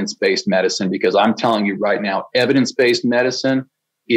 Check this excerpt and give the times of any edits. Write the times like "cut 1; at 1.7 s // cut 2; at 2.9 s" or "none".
none